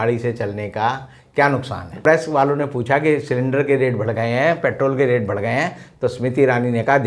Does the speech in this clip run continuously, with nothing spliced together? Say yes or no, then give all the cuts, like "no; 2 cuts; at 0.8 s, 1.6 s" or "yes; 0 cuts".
no; 1 cut; at 2.0 s